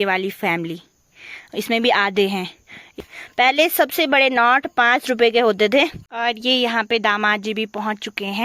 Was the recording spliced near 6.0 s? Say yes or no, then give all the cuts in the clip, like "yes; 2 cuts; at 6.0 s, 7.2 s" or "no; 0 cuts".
yes; 2 cuts; at 3.0 s, 6.0 s